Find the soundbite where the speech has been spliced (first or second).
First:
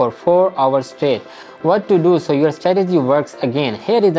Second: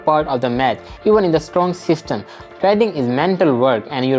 second